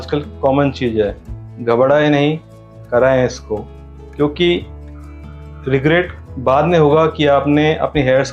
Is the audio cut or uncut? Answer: uncut